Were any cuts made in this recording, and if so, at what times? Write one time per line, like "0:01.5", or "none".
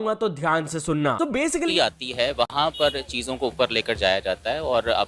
0:01.7